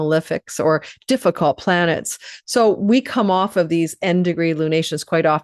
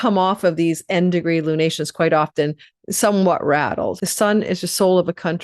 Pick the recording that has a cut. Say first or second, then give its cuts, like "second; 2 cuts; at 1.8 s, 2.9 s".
second; 1 cut; at 4.0 s